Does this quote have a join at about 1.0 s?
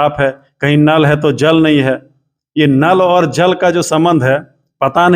no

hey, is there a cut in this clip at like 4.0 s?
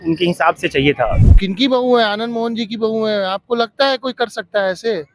no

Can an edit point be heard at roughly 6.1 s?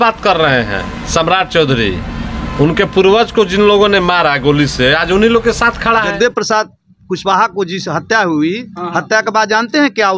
yes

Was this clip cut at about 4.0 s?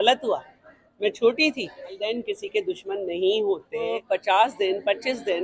yes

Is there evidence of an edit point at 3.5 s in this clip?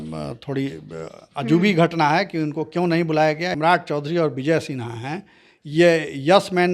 yes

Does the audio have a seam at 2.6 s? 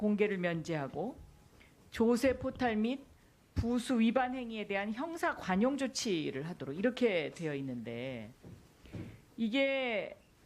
no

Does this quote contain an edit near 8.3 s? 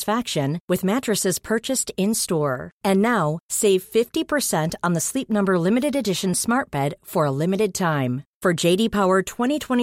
no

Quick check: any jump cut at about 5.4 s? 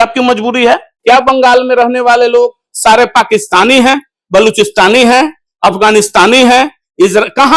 no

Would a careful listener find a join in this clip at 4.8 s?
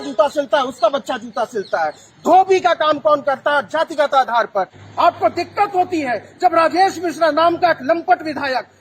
yes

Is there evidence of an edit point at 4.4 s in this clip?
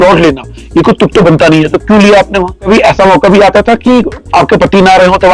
no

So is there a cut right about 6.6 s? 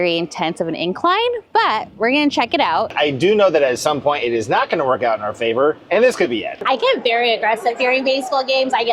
yes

